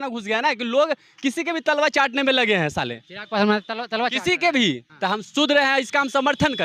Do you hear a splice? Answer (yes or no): yes